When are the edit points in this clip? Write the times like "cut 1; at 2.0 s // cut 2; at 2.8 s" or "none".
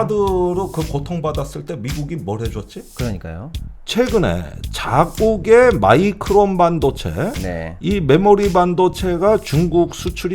cut 1; at 3.5 s